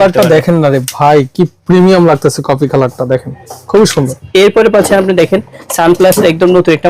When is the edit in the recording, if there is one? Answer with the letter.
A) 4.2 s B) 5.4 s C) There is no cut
A